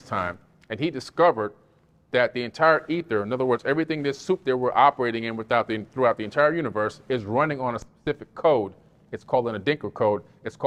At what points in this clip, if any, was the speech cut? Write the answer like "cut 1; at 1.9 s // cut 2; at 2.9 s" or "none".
none